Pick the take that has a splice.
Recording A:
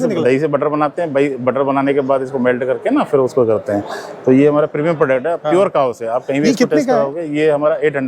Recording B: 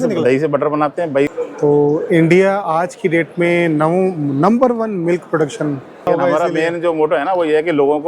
B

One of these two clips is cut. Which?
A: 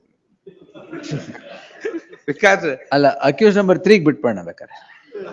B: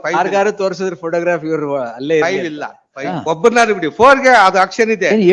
B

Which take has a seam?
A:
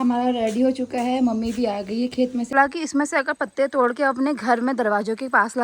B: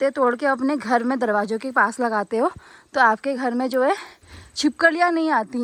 A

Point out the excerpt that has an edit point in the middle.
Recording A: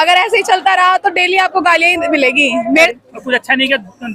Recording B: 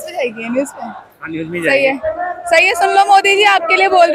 A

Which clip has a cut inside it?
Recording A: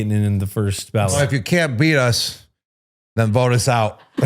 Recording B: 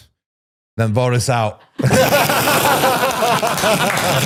A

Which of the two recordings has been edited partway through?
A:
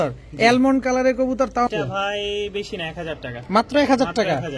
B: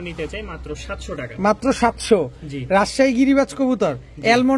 A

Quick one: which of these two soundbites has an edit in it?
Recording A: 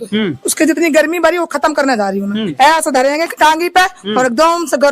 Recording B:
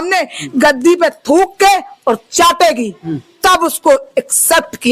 A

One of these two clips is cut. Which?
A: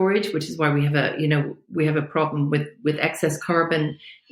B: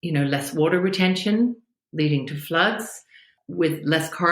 B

